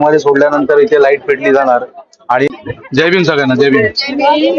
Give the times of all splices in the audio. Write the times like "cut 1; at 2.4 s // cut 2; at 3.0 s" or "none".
cut 1; at 2.5 s